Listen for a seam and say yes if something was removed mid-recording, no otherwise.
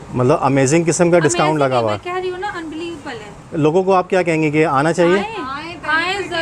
yes